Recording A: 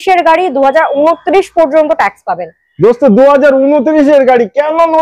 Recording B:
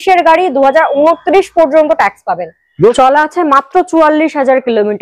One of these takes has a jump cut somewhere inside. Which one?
B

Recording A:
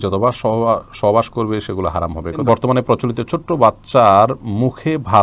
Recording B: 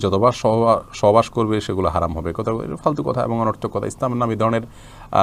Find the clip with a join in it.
A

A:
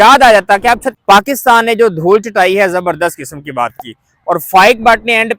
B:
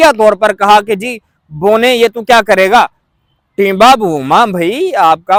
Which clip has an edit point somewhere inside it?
A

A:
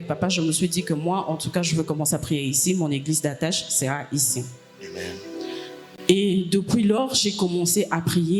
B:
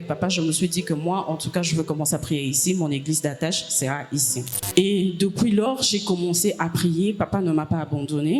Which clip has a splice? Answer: B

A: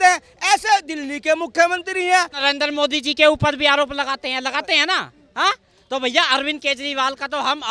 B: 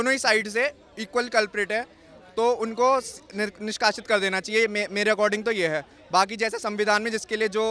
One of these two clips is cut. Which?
A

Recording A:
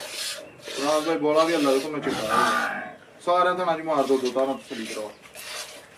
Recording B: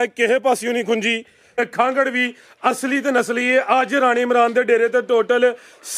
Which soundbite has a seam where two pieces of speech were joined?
B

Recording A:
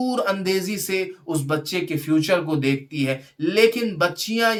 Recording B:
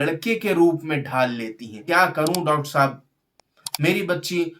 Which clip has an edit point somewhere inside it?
B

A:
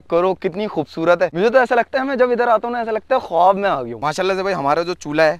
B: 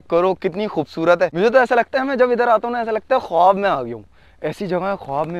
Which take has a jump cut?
A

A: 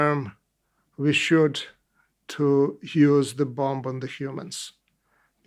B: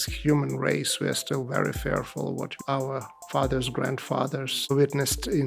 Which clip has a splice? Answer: B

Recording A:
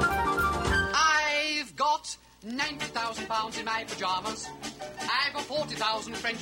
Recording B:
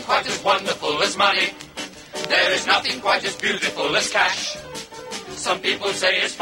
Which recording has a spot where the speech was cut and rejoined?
A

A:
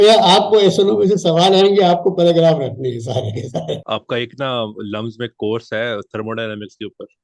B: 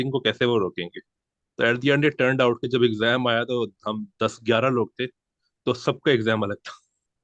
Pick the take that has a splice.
A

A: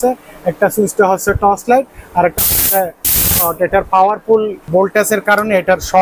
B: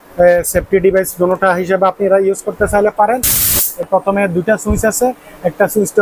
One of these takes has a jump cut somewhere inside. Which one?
B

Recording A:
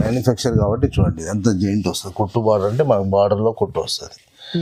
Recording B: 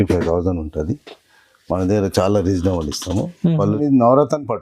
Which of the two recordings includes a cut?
B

